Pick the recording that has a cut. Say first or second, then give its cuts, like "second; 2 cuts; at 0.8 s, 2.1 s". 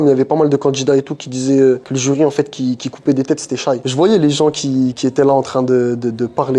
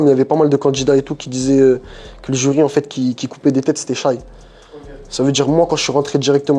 first; 2 cuts; at 1.9 s, 3.8 s